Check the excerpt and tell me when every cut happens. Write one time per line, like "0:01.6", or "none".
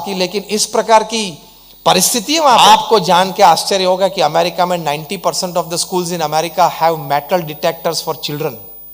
0:02.6